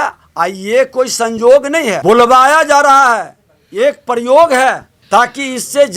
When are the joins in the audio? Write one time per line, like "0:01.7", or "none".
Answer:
0:02.0
0:04.9